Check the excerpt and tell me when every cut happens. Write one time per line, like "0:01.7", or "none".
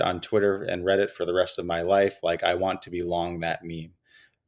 none